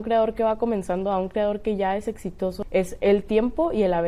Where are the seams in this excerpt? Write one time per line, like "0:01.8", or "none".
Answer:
0:02.6